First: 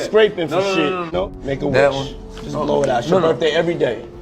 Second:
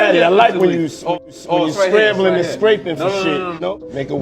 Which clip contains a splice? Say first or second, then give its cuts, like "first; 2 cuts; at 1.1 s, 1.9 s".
first; 1 cut; at 2.0 s